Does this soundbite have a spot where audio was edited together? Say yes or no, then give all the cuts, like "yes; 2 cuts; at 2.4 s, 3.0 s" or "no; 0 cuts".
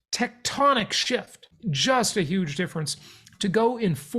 yes; 1 cut; at 1.4 s